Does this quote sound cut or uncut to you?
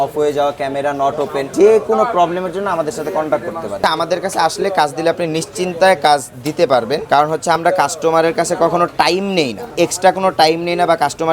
cut